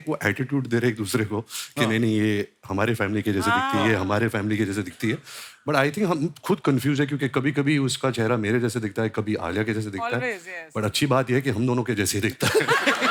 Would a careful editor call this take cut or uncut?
uncut